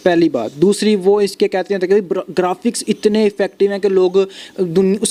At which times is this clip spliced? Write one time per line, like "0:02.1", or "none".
none